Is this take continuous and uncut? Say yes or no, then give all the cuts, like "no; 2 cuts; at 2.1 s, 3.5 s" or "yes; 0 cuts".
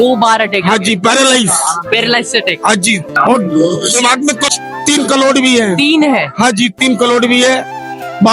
no; 2 cuts; at 3.2 s, 4.5 s